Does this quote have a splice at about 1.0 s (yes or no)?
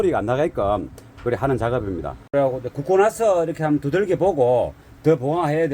no